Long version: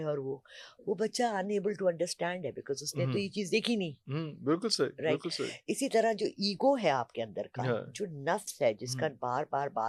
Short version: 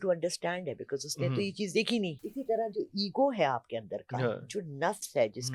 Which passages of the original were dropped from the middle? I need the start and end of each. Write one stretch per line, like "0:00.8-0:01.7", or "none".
0:04.0-0:05.7